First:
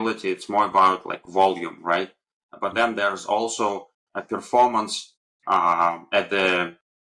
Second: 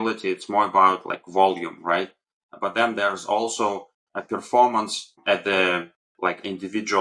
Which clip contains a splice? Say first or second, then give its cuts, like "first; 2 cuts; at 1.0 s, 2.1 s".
second; 1 cut; at 5.2 s